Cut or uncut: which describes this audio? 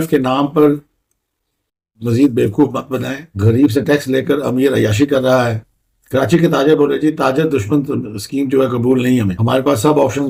uncut